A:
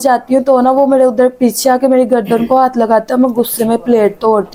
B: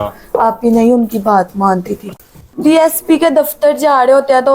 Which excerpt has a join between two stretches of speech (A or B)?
B